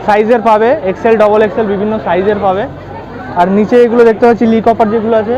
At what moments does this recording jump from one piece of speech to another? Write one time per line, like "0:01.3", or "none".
none